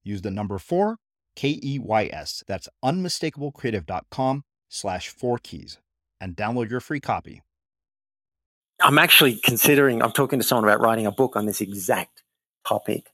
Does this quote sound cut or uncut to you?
cut